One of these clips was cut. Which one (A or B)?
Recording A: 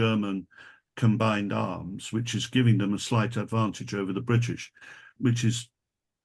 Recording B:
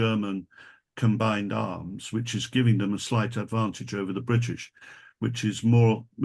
A